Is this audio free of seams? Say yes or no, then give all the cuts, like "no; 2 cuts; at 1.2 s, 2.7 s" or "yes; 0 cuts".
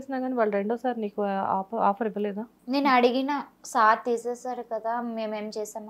yes; 0 cuts